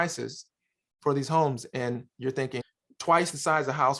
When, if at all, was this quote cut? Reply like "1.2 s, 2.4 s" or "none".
2.6 s